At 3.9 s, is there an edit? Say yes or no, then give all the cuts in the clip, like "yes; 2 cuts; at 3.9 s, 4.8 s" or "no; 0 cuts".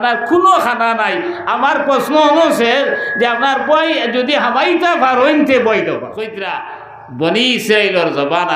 no; 1 cut; at 6.4 s